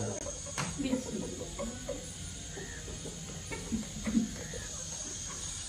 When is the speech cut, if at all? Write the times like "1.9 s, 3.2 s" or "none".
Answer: none